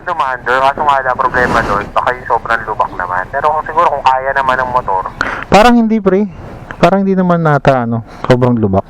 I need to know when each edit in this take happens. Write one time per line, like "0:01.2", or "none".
none